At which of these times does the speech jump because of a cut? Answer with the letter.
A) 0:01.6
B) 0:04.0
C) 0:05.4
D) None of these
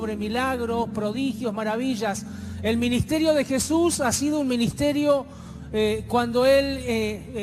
C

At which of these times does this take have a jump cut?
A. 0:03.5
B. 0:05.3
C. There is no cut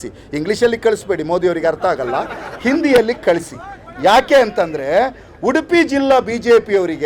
C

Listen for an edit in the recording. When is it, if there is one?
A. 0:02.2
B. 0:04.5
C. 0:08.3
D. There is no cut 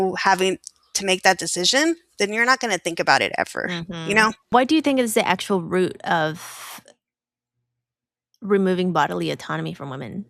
B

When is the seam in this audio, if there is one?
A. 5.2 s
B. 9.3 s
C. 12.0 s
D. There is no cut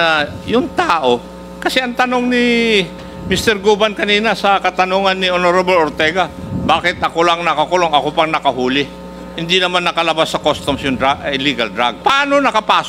C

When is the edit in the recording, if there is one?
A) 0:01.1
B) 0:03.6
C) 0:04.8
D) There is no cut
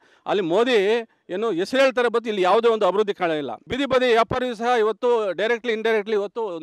B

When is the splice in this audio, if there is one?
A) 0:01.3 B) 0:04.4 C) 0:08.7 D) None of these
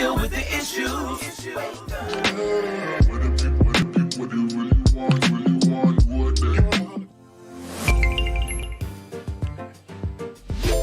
C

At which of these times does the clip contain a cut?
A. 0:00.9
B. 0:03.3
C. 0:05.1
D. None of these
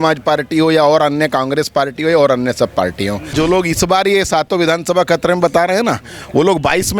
B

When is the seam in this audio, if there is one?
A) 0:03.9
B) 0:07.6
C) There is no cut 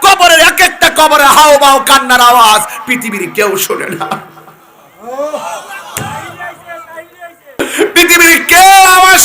B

